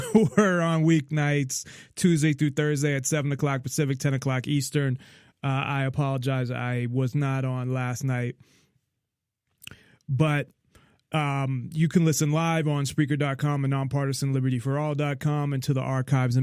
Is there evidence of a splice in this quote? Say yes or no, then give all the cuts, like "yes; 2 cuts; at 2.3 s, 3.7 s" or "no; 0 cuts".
no; 0 cuts